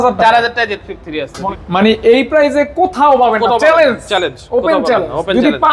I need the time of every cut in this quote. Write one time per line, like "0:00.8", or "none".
0:01.4